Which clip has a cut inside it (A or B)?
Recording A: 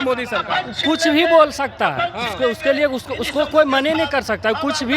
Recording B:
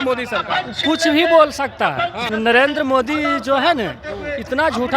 B